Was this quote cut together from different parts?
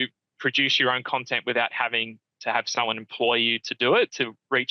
no; 0 cuts

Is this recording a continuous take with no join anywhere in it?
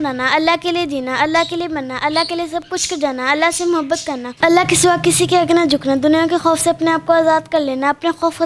no; 1 cut; at 4.3 s

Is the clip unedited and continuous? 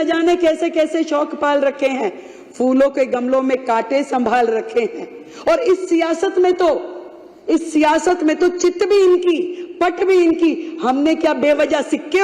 yes; 0 cuts

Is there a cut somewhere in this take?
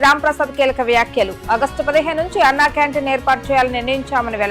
no; 0 cuts

